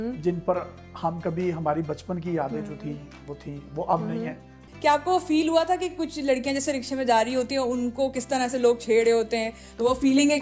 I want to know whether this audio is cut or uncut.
cut